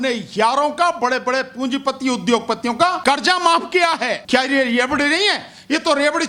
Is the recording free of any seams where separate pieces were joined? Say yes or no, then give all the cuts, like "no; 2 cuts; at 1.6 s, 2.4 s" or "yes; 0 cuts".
no; 2 cuts; at 3.0 s, 4.2 s